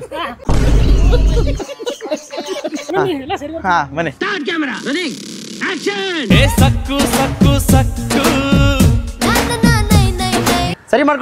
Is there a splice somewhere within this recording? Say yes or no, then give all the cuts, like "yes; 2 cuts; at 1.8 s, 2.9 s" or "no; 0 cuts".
no; 0 cuts